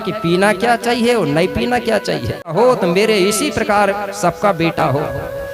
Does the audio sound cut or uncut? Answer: cut